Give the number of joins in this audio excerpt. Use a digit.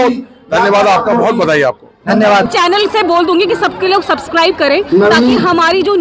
1